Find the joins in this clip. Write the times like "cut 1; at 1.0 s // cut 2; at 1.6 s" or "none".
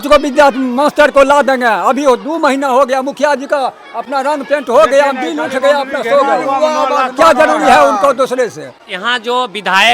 none